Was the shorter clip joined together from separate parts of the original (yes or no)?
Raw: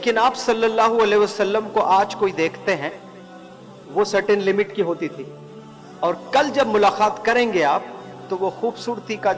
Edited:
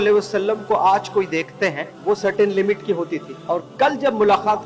yes